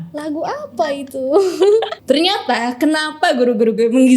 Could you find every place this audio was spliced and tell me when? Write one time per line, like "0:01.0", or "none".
0:01.9